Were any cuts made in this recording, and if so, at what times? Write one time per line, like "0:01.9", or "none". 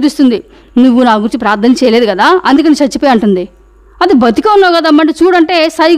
none